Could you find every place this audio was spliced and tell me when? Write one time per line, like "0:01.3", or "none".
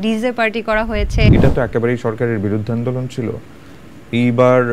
0:01.3